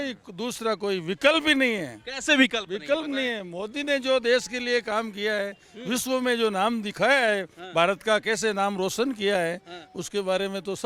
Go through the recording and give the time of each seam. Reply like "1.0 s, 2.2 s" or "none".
none